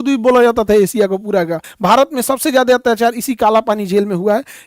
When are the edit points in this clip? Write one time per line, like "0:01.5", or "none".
0:01.7